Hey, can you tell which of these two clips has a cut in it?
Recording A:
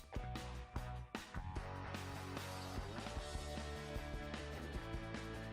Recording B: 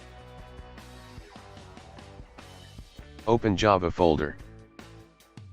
B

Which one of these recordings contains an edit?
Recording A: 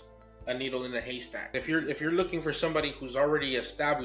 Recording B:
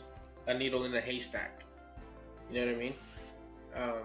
A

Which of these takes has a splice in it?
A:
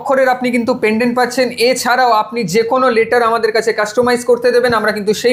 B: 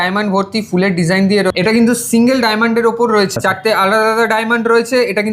B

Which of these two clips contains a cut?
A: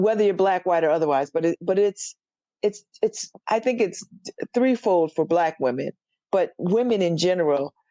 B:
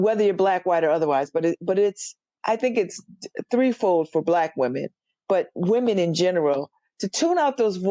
B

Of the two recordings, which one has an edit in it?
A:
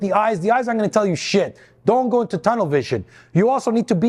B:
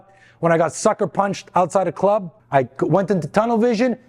B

